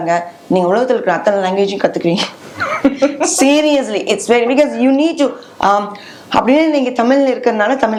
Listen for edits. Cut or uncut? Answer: uncut